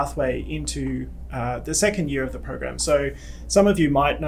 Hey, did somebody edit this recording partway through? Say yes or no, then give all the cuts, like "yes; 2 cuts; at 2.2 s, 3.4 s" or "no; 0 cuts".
no; 0 cuts